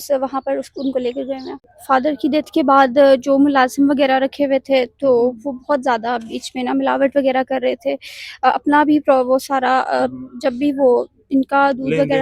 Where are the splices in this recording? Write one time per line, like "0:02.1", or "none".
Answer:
0:01.6